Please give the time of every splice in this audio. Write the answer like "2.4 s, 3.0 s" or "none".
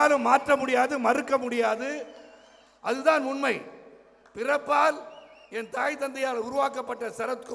none